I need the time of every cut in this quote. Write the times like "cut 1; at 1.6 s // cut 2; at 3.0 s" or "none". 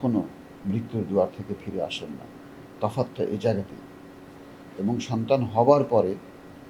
none